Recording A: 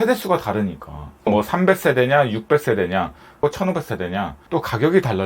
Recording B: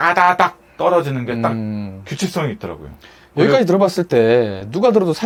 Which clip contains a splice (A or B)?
A